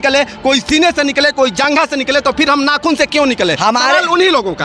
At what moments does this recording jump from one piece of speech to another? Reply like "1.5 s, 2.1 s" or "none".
none